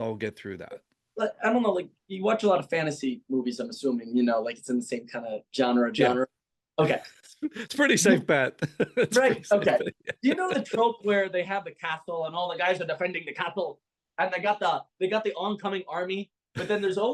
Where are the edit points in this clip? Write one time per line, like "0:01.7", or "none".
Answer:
none